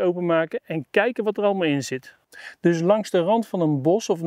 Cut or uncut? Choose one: cut